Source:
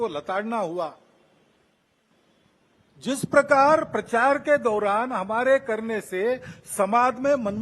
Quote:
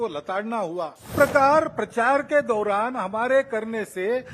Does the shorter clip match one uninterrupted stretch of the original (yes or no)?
no